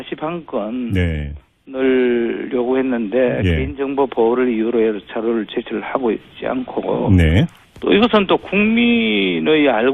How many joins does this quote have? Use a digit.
0